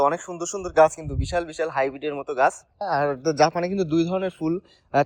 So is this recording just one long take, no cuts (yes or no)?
no